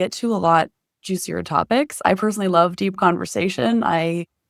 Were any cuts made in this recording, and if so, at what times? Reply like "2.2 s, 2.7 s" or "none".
none